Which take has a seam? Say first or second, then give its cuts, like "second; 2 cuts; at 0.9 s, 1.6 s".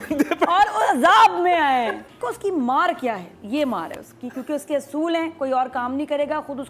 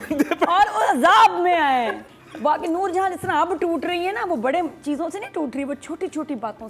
first; 1 cut; at 2.2 s